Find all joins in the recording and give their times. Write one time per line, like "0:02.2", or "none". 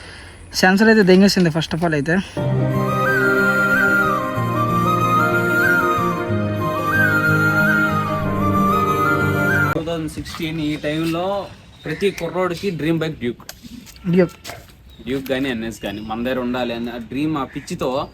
0:02.3
0:09.7